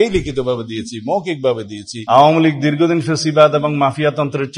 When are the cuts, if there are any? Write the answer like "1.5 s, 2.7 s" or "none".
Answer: 1.9 s